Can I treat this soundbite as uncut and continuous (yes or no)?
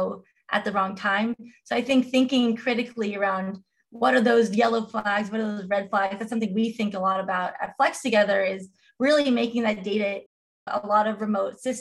yes